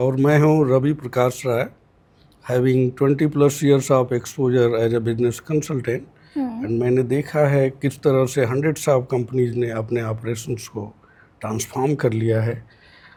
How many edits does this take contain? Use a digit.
0